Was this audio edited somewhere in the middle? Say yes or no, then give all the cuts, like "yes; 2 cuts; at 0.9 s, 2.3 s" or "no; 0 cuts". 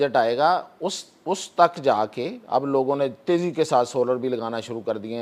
no; 0 cuts